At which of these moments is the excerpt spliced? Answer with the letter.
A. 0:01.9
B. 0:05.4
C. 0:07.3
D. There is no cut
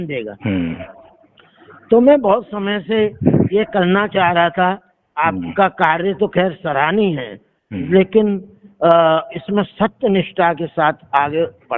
D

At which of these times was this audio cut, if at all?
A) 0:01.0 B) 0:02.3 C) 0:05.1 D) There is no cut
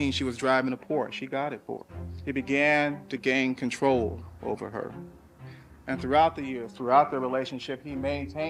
D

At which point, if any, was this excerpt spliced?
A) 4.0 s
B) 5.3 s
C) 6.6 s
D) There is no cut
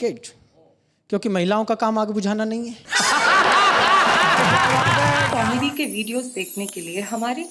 B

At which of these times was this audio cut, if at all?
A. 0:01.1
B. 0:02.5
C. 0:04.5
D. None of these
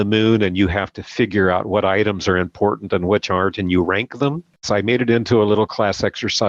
C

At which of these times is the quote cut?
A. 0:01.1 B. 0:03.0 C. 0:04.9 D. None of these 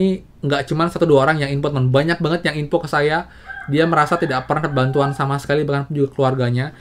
D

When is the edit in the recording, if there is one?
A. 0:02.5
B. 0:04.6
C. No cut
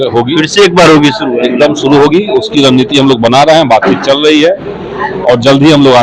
C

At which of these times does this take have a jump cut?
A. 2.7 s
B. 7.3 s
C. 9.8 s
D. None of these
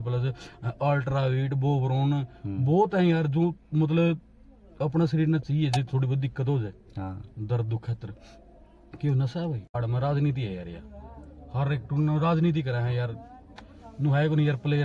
C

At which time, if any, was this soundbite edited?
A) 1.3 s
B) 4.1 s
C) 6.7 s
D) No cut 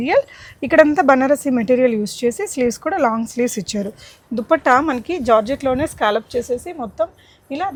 D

